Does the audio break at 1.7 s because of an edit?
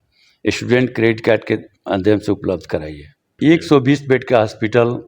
no; 1 cut; at 3.2 s

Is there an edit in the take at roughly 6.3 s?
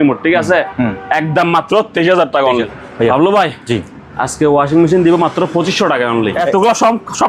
yes; 2 cuts; at 2.8 s, 6.3 s

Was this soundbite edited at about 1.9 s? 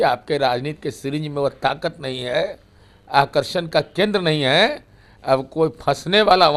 no; 0 cuts

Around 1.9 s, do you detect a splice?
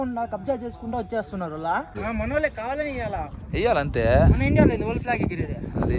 yes; 1 cut; at 1.9 s

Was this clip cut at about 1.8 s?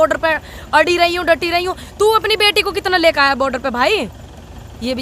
no; 0 cuts

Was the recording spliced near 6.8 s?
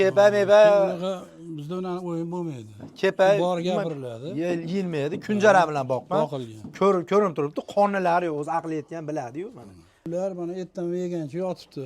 no; 1 cut; at 10.0 s

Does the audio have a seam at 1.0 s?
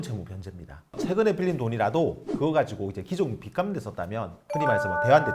yes; 1 cut; at 1.0 s

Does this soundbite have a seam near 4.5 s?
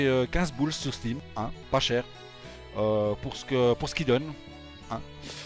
no; 1 cut; at 1.4 s

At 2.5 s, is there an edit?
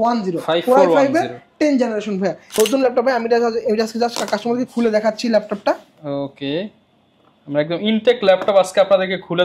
yes; 1 cut; at 2.5 s

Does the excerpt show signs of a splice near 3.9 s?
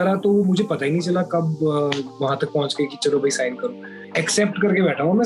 yes; 1 cut; at 3.9 s

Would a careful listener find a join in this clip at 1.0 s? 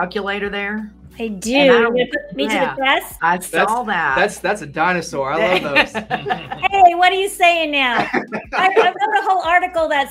yes; 2 cuts; at 1.0 s, 3.1 s

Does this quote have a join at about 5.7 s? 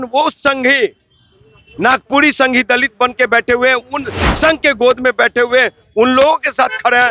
no; 0 cuts

